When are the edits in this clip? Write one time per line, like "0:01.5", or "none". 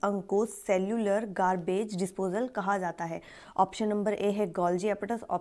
none